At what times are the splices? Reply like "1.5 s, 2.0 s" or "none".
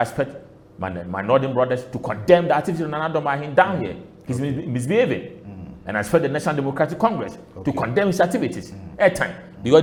none

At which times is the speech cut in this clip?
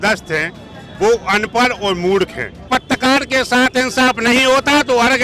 2.7 s

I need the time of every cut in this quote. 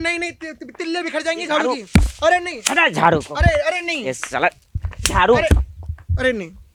none

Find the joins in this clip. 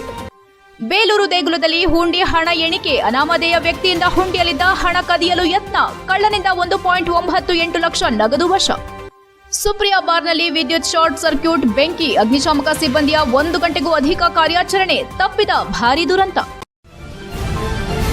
16.6 s

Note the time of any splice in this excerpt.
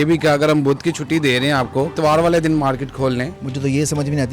1.9 s, 3.4 s

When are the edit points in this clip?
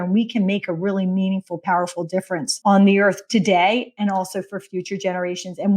2.5 s

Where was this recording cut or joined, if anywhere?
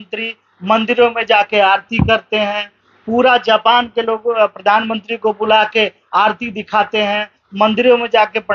none

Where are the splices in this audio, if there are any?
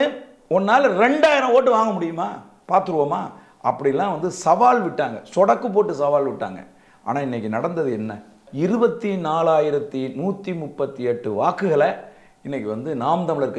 8.4 s

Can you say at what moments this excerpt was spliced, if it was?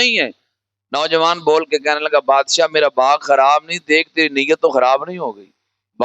none

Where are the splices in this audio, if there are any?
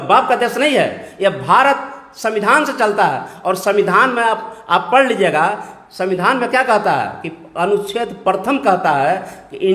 none

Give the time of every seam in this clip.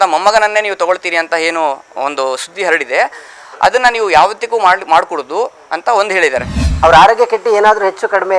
6.6 s

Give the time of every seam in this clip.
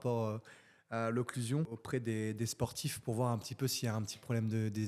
1.8 s

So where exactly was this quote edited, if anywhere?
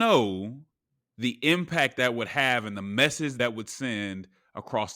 1.9 s, 3.3 s

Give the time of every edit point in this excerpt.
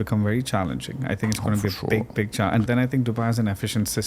2.7 s

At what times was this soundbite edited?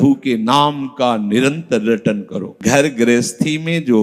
2.4 s

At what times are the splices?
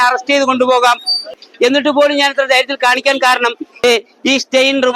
1.3 s, 3.8 s

